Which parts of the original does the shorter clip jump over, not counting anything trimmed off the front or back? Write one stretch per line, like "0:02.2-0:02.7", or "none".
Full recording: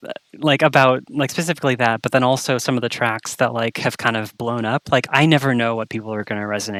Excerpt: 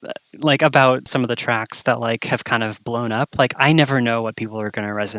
0:01.1-0:02.6